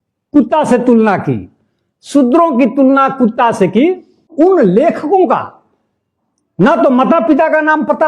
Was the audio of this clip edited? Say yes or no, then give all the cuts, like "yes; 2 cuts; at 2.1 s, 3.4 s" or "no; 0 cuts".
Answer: yes; 1 cut; at 4.3 s